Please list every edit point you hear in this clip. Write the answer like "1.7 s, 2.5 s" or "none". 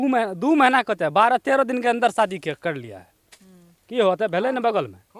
none